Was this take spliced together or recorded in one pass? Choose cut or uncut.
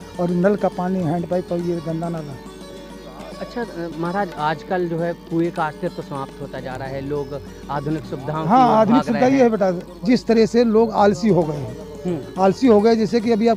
uncut